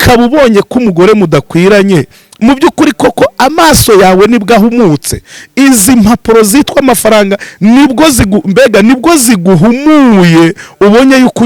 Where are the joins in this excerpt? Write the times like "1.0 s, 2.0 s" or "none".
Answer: none

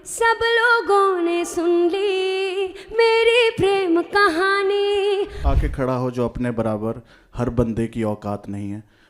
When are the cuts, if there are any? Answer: 5.4 s

